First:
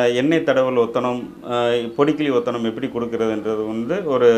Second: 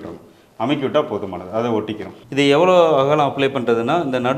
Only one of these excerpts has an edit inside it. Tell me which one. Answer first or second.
second